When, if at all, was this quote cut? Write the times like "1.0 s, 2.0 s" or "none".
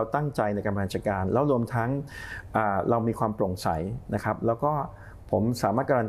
none